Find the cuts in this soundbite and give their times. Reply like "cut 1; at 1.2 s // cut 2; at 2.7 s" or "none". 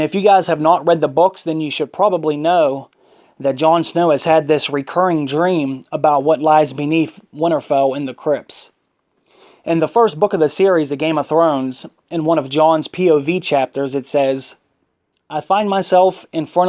cut 1; at 13.4 s